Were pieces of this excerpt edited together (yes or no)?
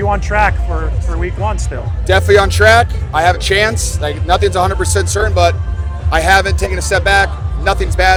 no